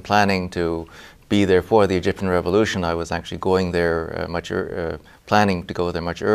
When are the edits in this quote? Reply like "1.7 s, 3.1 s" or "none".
none